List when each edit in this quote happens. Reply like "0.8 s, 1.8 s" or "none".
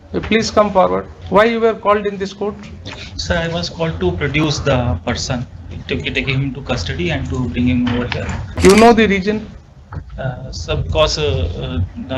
1.1 s, 8.5 s